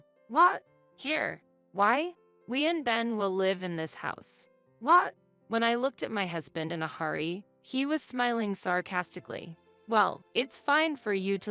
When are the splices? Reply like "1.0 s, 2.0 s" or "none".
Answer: 9.7 s